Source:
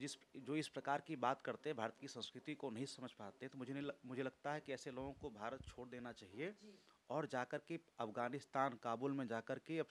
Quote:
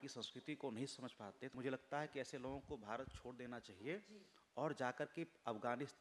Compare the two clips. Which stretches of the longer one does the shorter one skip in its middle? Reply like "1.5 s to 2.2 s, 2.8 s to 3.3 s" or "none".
3.5 s to 4.0 s